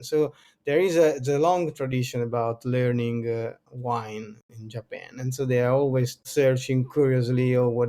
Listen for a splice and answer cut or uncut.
cut